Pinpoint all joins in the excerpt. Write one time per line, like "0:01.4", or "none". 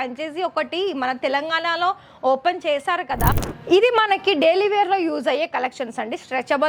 0:03.5